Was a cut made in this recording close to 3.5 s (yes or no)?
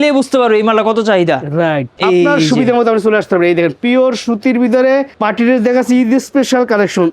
no